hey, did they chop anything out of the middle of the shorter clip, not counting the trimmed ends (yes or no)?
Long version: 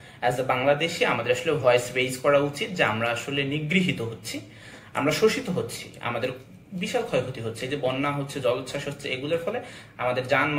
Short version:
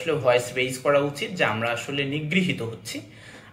no